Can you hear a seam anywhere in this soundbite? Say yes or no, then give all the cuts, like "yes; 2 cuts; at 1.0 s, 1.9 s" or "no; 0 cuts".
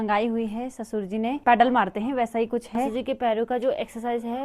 yes; 2 cuts; at 1.4 s, 2.9 s